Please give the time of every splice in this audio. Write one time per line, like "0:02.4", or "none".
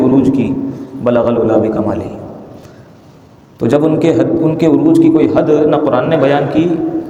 none

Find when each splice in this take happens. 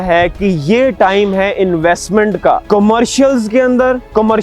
0:02.6

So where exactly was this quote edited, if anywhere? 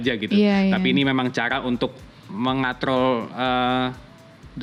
none

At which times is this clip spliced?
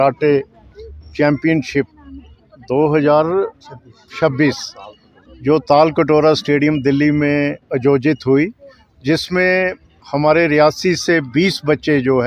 none

